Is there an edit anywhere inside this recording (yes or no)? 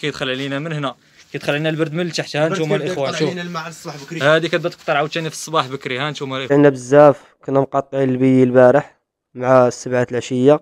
yes